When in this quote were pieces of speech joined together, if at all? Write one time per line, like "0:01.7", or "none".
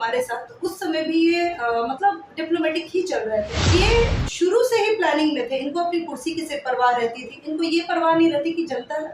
0:03.6